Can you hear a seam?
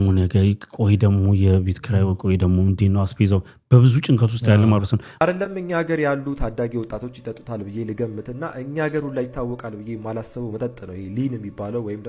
yes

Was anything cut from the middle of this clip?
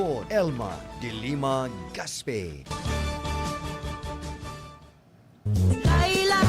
yes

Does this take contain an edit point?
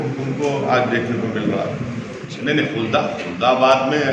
yes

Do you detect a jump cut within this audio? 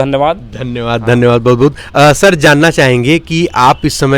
no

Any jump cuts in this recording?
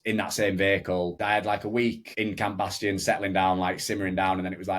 yes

